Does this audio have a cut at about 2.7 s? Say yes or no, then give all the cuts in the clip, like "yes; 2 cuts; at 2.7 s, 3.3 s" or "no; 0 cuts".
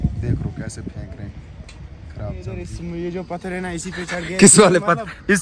yes; 1 cut; at 2.7 s